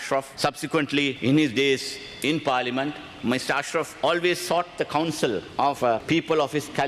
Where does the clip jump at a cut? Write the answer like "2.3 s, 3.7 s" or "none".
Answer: 1.2 s, 3.1 s, 5.7 s